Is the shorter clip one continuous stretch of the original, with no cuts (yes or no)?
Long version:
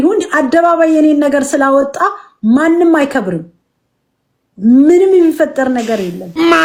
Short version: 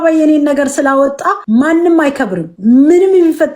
no